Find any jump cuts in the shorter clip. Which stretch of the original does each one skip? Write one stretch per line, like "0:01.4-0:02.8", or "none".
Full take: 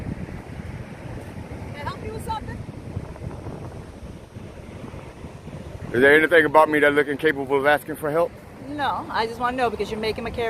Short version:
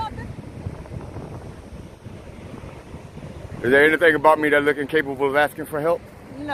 none